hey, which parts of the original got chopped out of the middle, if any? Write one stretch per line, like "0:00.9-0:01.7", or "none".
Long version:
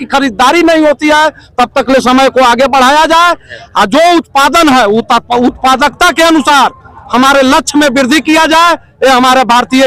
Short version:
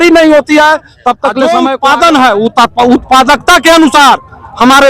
0:02.0-0:04.0